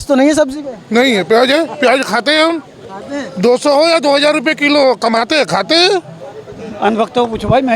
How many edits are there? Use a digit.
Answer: 1